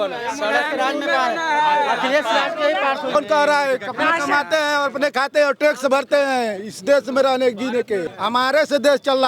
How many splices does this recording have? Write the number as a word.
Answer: two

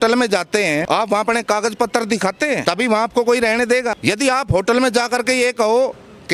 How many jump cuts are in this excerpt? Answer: three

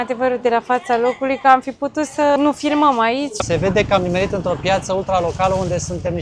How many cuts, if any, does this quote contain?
two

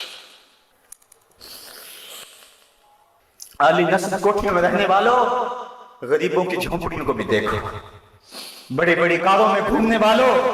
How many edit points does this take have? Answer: one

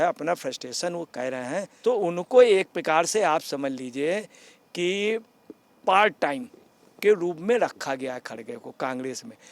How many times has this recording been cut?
one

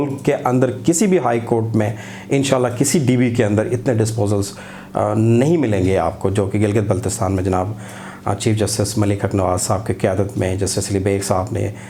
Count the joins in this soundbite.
zero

